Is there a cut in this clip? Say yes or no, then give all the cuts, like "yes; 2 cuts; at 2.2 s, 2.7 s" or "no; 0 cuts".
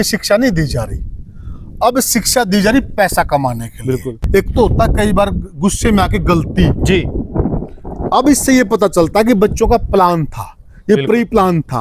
yes; 1 cut; at 4.2 s